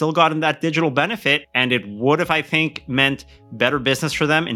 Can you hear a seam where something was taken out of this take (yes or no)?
yes